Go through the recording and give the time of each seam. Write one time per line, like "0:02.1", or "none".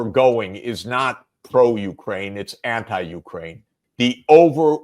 0:03.7